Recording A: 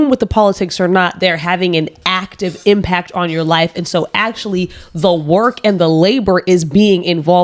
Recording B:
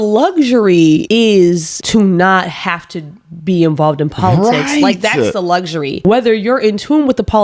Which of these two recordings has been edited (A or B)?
B